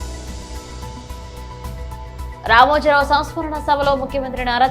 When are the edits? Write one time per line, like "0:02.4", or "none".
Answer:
none